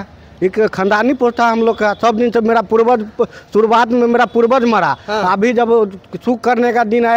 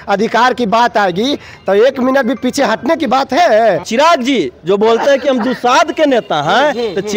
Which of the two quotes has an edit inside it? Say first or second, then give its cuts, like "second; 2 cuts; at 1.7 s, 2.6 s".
second; 1 cut; at 3.9 s